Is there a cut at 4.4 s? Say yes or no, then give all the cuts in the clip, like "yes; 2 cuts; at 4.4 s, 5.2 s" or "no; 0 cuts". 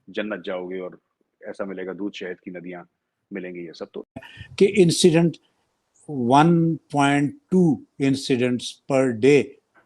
yes; 1 cut; at 4.4 s